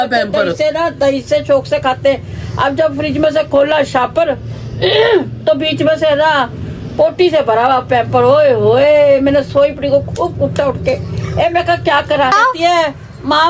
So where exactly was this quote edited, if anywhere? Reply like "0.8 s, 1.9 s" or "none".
8.4 s, 12.4 s